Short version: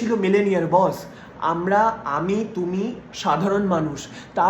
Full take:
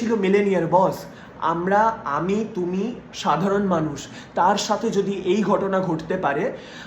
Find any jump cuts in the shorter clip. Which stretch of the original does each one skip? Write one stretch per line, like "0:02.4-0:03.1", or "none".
none